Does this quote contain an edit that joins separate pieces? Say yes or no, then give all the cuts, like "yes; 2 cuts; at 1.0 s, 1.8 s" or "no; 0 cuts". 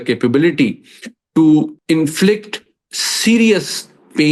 yes; 1 cut; at 1.8 s